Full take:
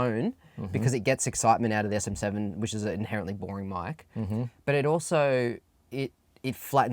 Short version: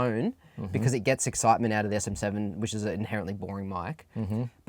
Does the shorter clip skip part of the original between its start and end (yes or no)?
no